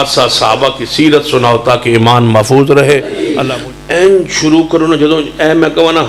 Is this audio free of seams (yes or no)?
no